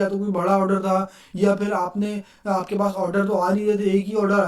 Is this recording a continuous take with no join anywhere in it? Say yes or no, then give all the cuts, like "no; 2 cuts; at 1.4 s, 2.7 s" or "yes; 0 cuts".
yes; 0 cuts